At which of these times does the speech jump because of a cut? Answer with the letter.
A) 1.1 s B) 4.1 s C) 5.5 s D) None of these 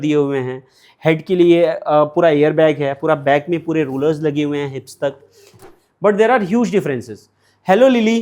C